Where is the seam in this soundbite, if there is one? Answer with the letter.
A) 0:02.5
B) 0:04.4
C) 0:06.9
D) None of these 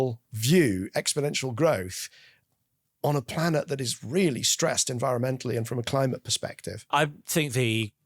C